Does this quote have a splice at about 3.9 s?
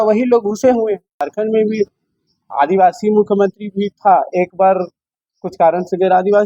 no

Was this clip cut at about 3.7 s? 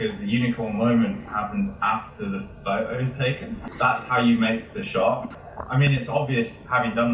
no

